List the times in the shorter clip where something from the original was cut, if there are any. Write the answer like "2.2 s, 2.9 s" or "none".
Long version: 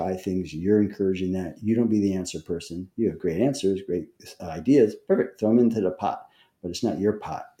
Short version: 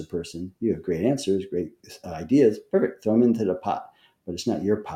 none